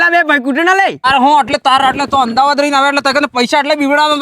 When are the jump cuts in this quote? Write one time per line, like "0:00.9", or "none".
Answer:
0:01.1